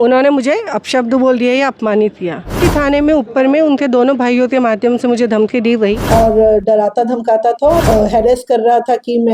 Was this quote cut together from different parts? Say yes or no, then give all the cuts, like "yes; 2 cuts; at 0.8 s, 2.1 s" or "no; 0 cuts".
yes; 3 cuts; at 2.6 s, 6.0 s, 7.8 s